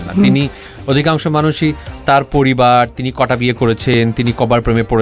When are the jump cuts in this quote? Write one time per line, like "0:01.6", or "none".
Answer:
none